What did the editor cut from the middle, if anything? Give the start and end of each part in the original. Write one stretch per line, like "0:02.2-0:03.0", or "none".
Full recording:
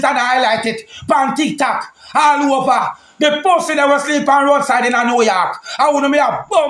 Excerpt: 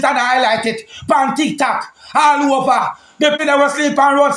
0:03.4-0:03.7